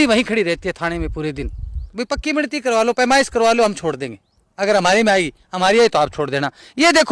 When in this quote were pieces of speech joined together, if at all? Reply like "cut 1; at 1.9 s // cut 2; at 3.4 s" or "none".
cut 1; at 1.8 s